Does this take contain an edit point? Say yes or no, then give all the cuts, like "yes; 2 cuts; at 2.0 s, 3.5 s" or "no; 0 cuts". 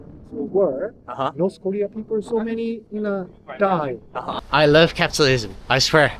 yes; 1 cut; at 4.4 s